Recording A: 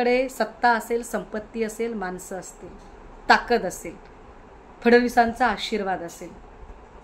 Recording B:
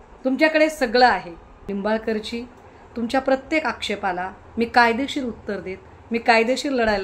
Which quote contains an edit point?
B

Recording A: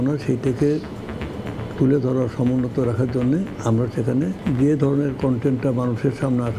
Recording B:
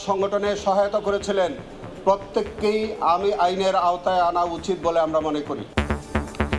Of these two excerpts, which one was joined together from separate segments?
B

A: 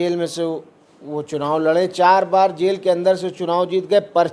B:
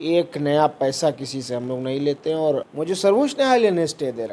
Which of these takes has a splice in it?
B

